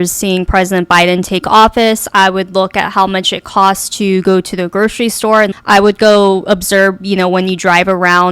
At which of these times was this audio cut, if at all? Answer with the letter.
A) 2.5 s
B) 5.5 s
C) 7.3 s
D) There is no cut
B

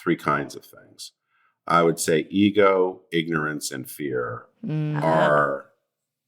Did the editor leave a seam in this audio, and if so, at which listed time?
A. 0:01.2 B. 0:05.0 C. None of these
B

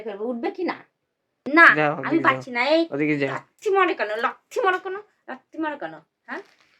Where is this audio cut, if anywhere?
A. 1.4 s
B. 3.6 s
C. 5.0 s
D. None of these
A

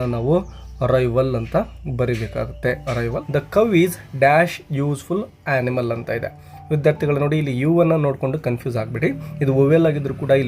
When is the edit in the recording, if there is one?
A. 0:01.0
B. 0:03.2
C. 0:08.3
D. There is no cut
B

